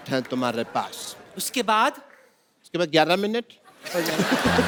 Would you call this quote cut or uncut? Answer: uncut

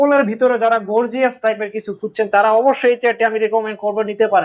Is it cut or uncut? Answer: uncut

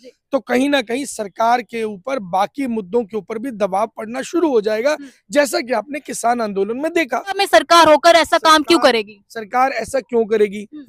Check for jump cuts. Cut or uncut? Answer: cut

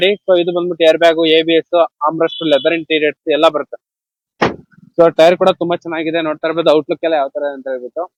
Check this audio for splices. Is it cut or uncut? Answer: uncut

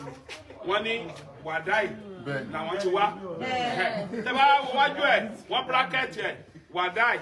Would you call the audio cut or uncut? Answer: uncut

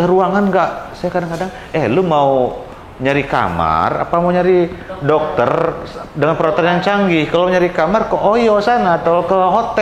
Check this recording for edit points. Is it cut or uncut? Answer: uncut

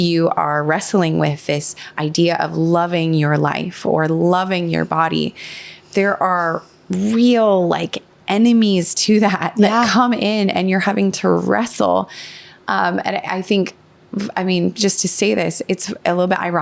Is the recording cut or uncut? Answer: uncut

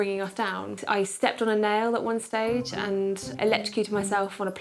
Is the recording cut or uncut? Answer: cut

